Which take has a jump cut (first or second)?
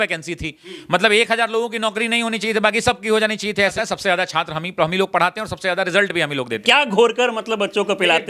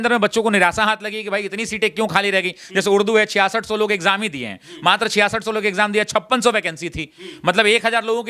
first